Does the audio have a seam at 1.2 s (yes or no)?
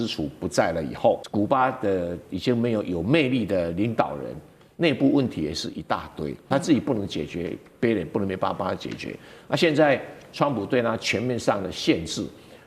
yes